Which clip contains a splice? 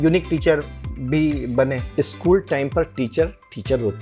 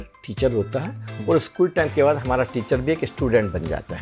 first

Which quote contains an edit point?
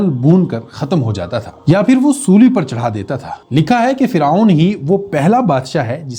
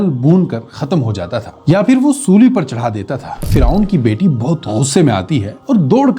second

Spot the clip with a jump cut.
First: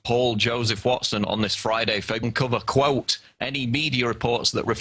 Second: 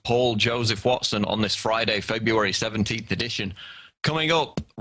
second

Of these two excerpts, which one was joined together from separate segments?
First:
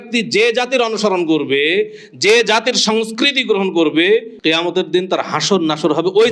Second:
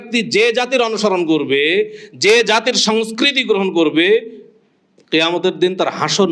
first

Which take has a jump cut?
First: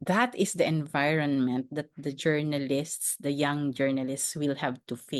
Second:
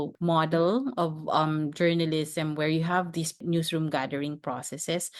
second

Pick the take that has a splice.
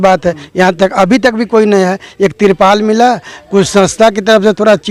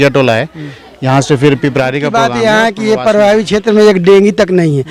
second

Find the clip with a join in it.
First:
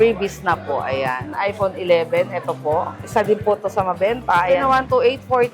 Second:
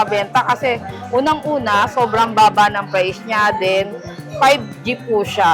first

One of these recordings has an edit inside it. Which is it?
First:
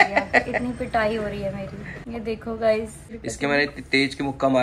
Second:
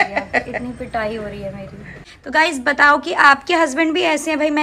second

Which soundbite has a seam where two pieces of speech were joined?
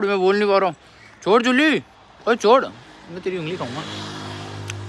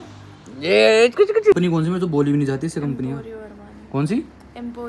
second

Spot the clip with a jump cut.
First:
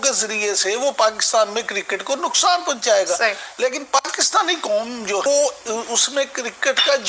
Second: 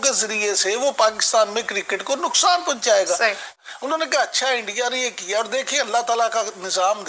second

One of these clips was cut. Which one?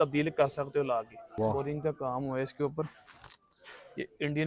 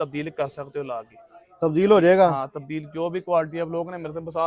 first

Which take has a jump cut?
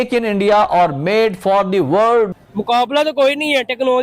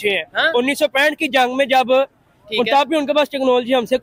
first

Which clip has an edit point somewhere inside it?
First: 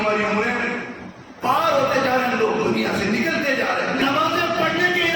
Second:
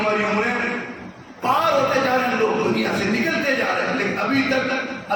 first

